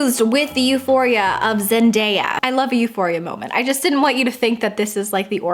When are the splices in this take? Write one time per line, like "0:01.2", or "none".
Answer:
none